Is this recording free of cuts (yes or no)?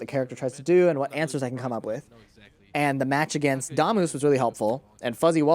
yes